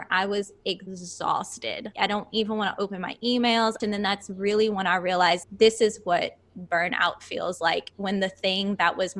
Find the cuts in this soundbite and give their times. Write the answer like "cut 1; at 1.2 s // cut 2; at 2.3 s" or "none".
cut 1; at 1.0 s // cut 2; at 1.9 s // cut 3; at 3.8 s